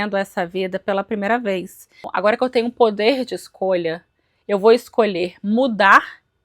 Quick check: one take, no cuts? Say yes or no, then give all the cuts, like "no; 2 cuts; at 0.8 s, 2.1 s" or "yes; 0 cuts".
no; 1 cut; at 2.1 s